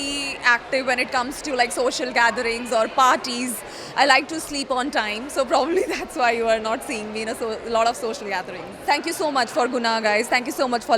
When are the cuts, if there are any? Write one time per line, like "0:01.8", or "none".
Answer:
0:08.8